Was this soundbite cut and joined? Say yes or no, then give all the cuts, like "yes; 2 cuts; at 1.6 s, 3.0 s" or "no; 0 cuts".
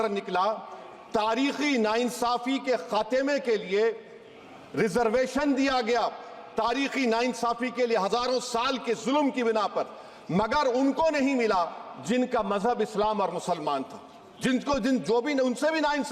no; 0 cuts